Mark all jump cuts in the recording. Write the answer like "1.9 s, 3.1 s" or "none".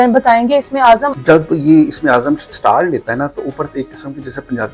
1.1 s